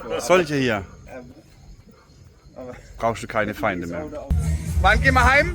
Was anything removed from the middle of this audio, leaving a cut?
yes; 1 cut; at 4.4 s

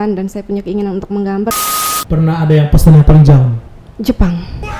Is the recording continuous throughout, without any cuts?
no; 1 cut; at 1.9 s

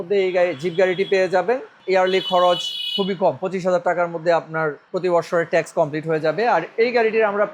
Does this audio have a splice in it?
yes; 2 cuts; at 1.8 s, 4.8 s

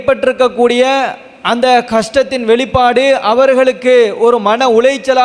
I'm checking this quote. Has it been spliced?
no; 0 cuts

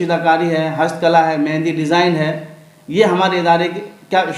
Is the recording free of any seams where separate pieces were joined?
yes; 0 cuts

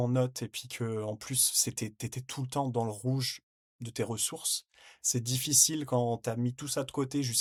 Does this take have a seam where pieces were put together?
no; 0 cuts

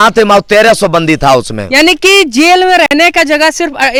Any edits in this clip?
no; 0 cuts

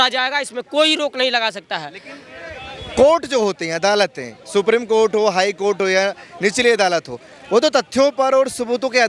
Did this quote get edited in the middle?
no; 0 cuts

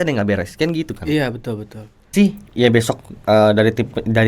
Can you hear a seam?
yes; 1 cut; at 2.1 s

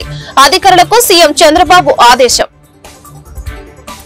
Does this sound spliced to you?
yes; 1 cut; at 2.6 s

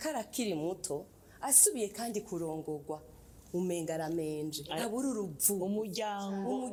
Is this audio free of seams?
yes; 0 cuts

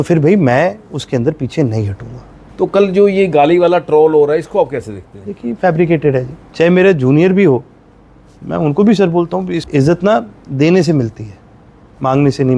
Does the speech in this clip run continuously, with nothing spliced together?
no; 3 cuts; at 2.4 s, 6.4 s, 9.6 s

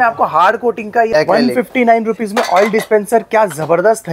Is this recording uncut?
no; 1 cut; at 1.1 s

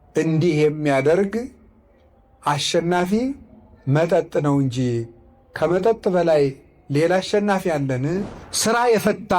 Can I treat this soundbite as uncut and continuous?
no; 1 cut; at 8.4 s

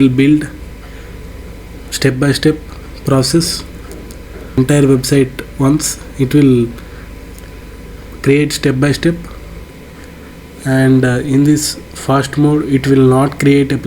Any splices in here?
yes; 1 cut; at 4.6 s

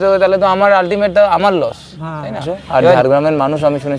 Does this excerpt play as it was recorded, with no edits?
no; 1 cut; at 3.0 s

